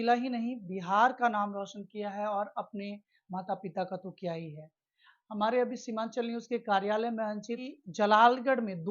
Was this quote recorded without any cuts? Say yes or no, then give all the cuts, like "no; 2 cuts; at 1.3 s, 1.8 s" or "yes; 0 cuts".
no; 1 cut; at 7.7 s